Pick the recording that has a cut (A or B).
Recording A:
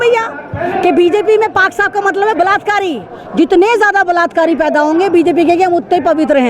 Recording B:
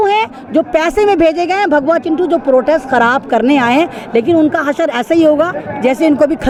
A